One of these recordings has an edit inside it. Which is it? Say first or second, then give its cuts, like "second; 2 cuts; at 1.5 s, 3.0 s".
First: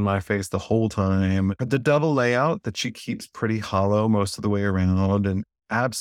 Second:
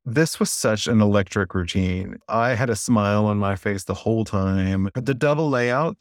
second; 1 cut; at 2.1 s